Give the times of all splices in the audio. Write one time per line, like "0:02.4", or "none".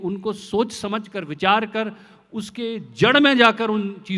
none

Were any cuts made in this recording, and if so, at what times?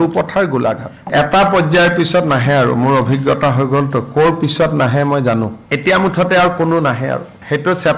0:01.0

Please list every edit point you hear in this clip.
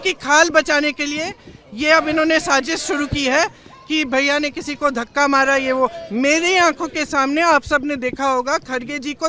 none

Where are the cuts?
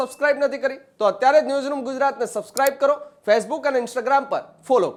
none

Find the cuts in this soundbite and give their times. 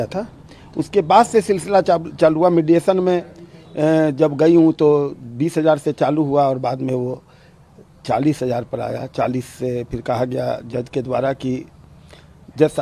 none

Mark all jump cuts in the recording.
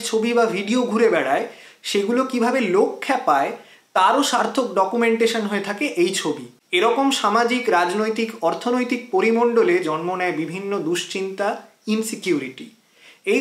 0:06.5

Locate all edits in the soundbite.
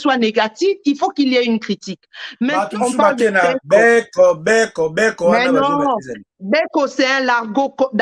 0:02.5

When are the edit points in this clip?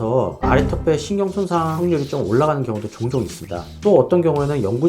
0:03.8

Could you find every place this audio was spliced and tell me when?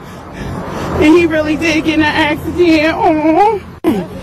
0:01.1

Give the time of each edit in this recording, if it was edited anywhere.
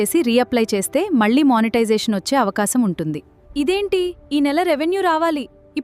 0:03.3

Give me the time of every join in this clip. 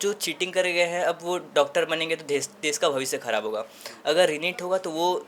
none

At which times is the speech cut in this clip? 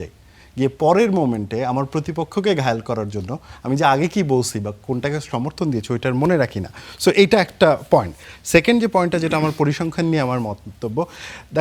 none

